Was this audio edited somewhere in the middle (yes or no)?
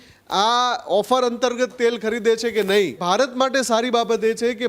yes